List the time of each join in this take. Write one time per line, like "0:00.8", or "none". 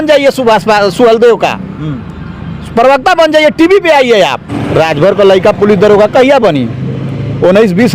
0:04.5